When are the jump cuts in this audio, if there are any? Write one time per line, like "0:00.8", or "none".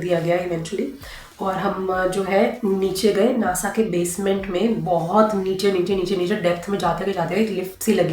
none